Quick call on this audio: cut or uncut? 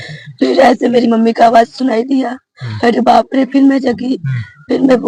uncut